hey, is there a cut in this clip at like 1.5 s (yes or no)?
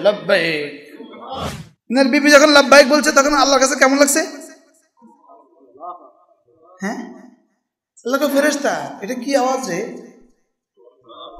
yes